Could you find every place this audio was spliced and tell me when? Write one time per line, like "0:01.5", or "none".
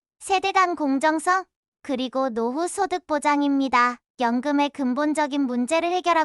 0:04.0